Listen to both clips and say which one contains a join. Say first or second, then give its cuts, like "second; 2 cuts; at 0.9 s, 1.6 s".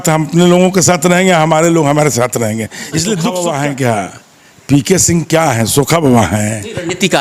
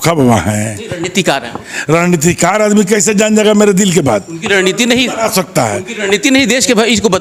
first; 1 cut; at 3.3 s